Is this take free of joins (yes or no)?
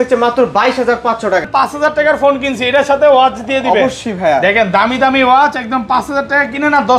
no